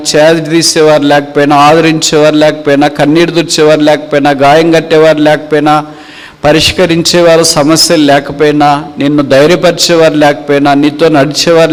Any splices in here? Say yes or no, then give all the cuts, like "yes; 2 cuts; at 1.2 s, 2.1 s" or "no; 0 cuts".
no; 0 cuts